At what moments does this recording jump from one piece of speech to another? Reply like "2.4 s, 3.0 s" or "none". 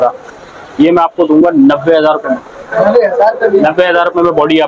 none